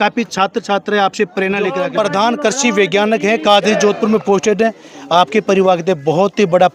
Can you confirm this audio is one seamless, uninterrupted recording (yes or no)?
no